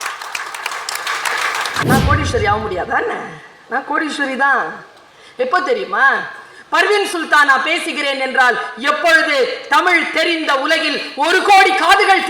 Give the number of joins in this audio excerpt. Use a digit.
1